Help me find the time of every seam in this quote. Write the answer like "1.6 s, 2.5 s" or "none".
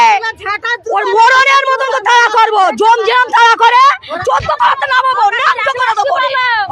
4.1 s